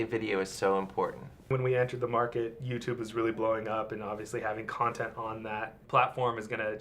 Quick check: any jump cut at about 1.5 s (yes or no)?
yes